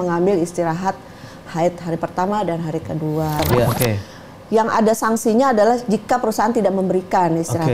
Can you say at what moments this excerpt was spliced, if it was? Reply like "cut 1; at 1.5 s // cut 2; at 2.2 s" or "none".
cut 1; at 3.7 s